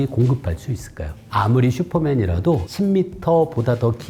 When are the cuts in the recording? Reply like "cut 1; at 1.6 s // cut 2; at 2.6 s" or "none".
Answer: cut 1; at 1.1 s // cut 2; at 2.7 s